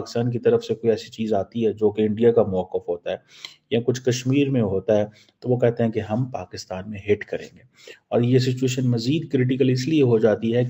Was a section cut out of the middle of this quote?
no; 0 cuts

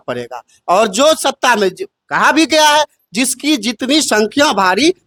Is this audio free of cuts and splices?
yes; 0 cuts

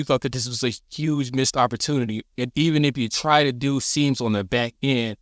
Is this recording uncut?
yes; 0 cuts

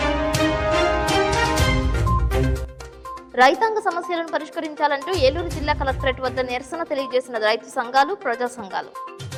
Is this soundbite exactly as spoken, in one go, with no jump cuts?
yes; 0 cuts

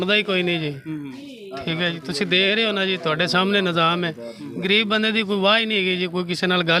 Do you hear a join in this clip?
no; 0 cuts

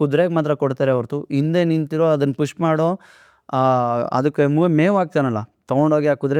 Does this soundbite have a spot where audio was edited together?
no; 0 cuts

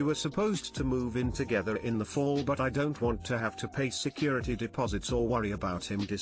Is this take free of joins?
yes; 0 cuts

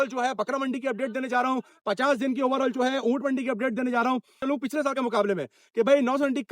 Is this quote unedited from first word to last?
no; 1 cut; at 4.4 s

